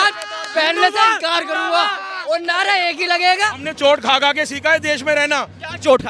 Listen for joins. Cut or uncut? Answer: cut